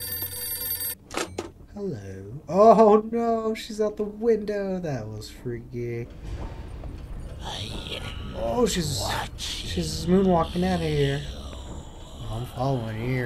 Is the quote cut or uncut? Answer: cut